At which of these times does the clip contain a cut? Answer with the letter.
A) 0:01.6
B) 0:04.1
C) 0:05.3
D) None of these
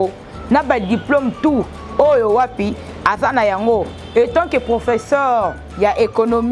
D